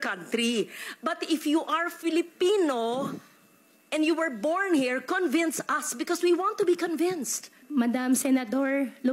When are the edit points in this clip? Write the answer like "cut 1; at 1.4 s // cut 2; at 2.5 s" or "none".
cut 1; at 7.6 s